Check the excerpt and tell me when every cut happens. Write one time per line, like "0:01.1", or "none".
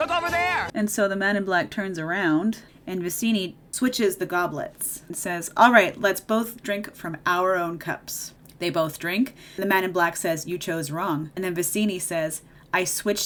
none